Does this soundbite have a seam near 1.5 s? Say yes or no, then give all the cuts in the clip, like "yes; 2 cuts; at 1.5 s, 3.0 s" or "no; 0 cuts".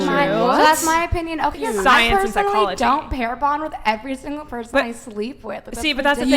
yes; 1 cut; at 1.5 s